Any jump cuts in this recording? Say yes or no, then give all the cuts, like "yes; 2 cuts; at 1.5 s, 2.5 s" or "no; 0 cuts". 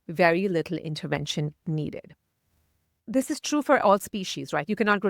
yes; 1 cut; at 3.1 s